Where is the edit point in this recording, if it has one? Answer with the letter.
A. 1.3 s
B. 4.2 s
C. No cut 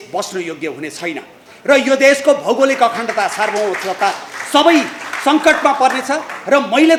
C